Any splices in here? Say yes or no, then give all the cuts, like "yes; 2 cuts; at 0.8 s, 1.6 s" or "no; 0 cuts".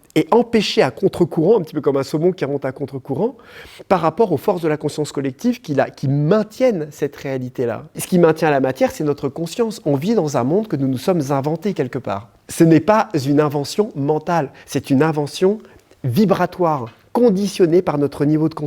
yes; 2 cuts; at 8.0 s, 12.4 s